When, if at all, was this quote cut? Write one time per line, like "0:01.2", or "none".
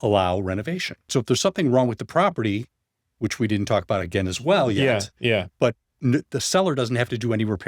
0:01.1